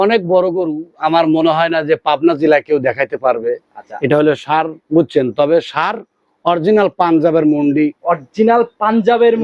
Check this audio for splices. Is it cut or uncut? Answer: cut